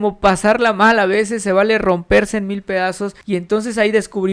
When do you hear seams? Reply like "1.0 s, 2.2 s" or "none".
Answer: 3.1 s